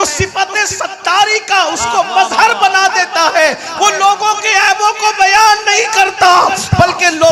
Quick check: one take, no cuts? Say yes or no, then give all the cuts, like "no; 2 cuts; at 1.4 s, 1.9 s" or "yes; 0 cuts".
yes; 0 cuts